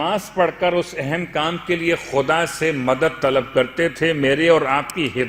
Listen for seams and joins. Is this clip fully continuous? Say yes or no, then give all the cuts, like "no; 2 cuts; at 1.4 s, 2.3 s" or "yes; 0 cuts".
yes; 0 cuts